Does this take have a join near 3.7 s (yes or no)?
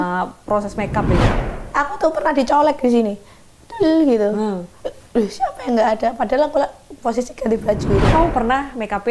no